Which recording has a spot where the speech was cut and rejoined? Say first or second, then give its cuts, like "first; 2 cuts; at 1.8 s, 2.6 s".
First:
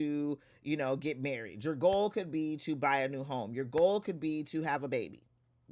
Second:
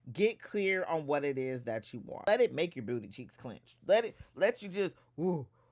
second; 1 cut; at 2.2 s